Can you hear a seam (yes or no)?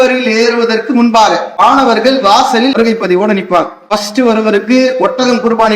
yes